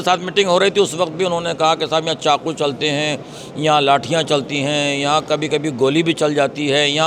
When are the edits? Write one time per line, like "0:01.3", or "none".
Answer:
none

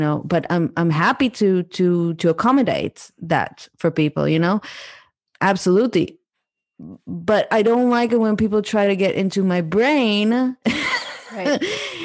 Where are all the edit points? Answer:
0:05.2

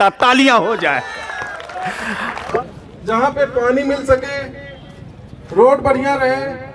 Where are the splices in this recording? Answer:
0:02.6

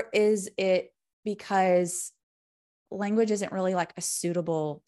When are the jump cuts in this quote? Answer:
none

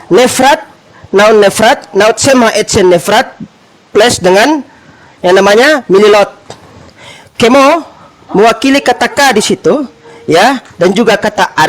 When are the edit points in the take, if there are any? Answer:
none

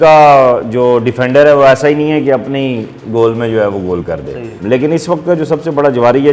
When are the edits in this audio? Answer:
0:04.5

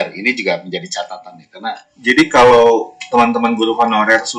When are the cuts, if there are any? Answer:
0:01.9

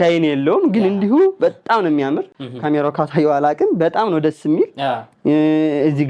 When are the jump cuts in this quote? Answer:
none

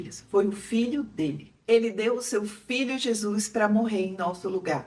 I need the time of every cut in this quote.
none

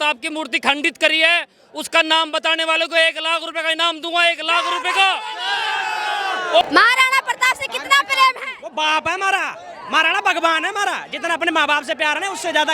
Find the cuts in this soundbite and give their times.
0:06.6

